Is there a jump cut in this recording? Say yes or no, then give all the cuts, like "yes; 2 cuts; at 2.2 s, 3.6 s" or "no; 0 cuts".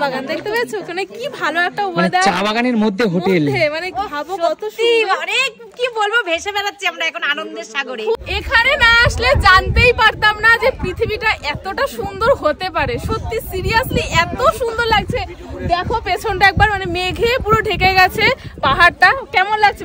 yes; 1 cut; at 8.2 s